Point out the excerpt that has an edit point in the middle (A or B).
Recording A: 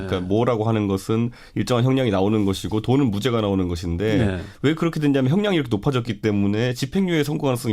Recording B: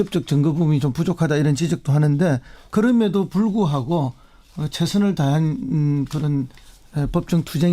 B